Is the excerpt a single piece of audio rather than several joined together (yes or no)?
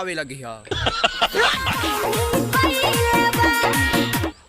no